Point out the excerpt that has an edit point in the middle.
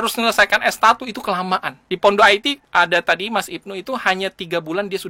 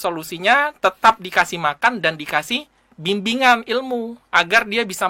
first; 2 cuts; at 1.7 s, 2.6 s

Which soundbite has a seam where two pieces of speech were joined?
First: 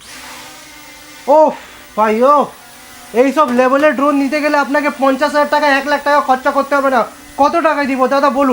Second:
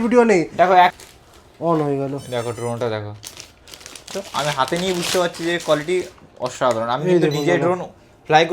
second; 2 cuts; at 1.0 s, 4.1 s

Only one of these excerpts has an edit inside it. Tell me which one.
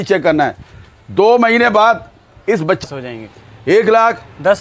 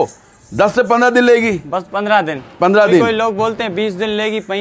first; 1 cut; at 2.8 s

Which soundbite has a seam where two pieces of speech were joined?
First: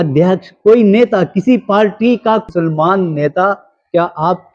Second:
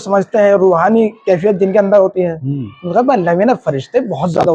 first; 1 cut; at 2.4 s

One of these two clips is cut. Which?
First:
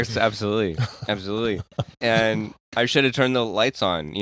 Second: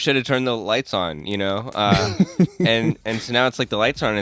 first; 1 cut; at 1.9 s

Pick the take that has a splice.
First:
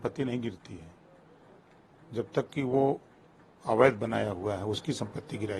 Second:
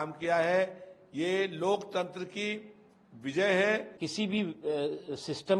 second; 1 cut; at 4.0 s

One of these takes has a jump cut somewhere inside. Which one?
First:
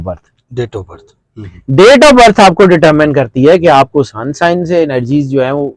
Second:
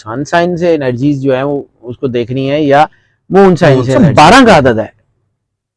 second; 1 cut; at 4.0 s

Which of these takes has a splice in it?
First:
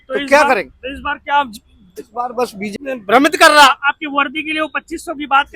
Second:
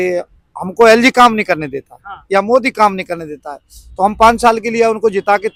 first; 1 cut; at 2.7 s

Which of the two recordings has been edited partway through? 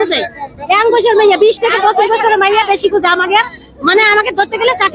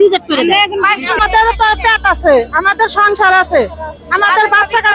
second; 1 cut; at 1.2 s

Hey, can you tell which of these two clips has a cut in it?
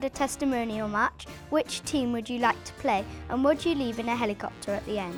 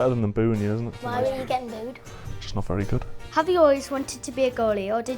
second; 2 cuts; at 1.0 s, 3.1 s

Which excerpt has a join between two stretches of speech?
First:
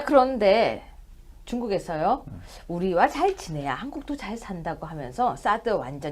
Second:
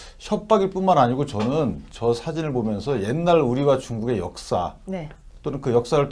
first; 1 cut; at 1.0 s

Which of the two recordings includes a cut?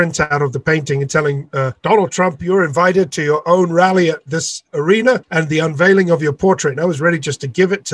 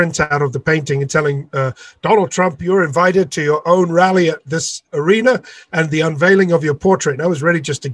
first; 2 cuts; at 1.8 s, 5.3 s

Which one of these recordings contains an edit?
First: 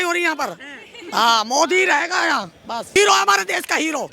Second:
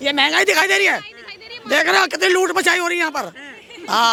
first; 1 cut; at 3.0 s

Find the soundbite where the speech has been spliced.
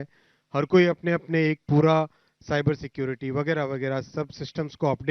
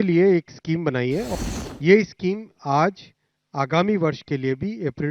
second; 1 cut; at 1.3 s

